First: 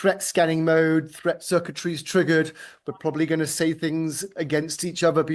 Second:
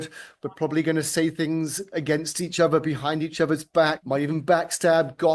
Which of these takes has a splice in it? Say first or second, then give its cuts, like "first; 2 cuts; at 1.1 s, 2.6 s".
second; 1 cut; at 4.0 s